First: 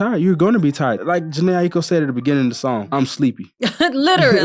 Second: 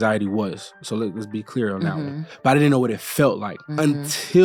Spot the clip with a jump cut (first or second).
first